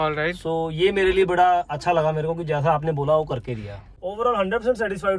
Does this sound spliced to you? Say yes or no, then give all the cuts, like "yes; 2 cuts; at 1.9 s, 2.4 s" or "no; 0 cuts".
yes; 1 cut; at 3.8 s